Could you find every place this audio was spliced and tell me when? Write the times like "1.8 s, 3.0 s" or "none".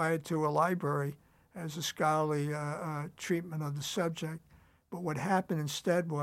none